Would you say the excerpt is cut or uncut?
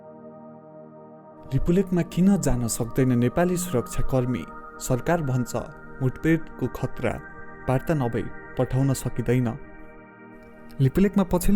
cut